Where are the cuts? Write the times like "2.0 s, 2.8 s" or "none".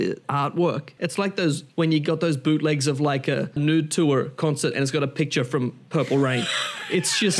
0.9 s, 3.5 s